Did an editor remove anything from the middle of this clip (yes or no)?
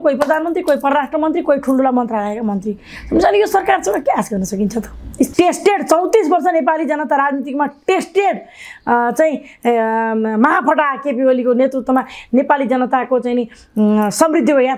yes